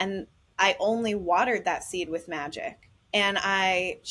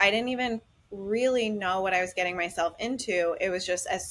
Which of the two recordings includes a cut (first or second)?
first